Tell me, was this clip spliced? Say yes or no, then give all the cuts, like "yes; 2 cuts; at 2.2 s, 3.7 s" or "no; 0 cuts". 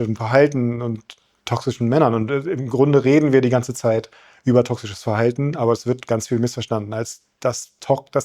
no; 0 cuts